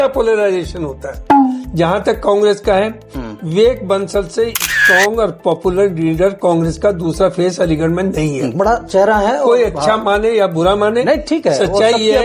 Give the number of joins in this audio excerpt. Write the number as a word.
one